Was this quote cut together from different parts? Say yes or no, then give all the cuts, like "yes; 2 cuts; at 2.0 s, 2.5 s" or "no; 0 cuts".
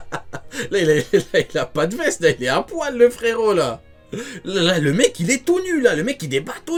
no; 0 cuts